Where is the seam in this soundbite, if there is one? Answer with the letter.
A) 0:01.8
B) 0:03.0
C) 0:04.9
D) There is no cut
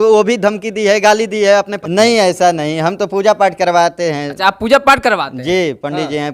A